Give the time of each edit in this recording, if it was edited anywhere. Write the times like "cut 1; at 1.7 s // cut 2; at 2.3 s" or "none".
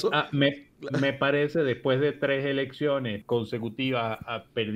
cut 1; at 3.2 s